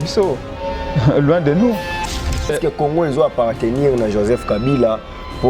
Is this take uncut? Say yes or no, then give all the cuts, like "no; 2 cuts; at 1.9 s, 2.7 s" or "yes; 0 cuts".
no; 1 cut; at 2.2 s